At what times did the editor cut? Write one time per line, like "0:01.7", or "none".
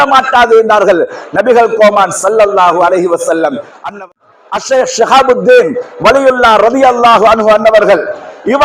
0:04.1